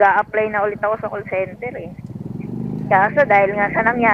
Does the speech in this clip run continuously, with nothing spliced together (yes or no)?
yes